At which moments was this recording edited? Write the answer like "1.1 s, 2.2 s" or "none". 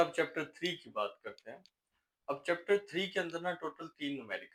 none

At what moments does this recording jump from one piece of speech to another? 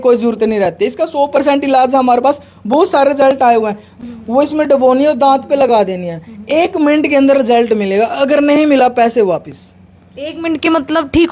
4.0 s

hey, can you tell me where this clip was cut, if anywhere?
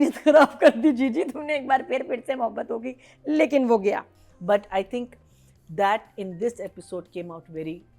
4.1 s

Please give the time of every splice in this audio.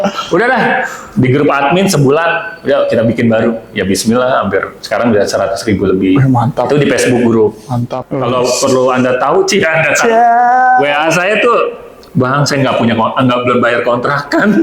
7.9 s

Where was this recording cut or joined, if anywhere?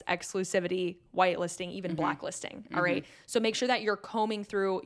none

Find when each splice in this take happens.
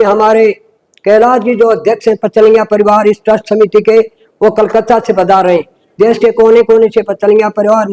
none

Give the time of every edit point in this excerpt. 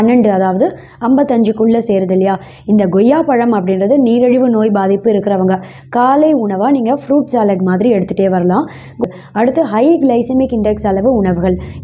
9.0 s

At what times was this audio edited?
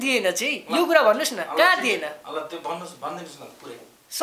none

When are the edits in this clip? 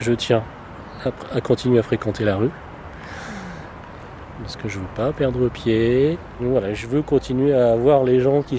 6.3 s

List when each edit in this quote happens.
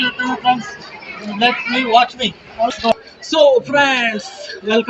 2.7 s

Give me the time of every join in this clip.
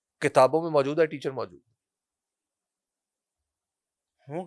none

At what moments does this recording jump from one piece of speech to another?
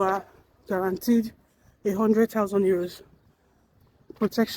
none

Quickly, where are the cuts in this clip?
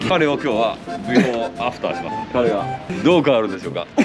2.1 s, 2.9 s

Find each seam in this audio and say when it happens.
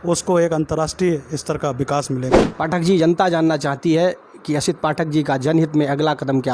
2.5 s

